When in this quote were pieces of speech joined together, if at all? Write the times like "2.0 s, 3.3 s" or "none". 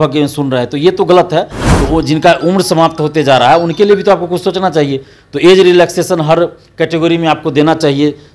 1.6 s